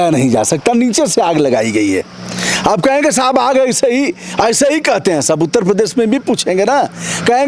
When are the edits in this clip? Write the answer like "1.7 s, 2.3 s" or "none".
none